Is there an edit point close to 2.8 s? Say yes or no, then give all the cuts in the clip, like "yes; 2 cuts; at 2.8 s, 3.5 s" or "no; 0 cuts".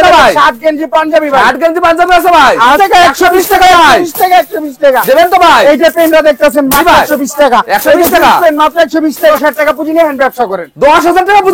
yes; 2 cuts; at 2.8 s, 9.3 s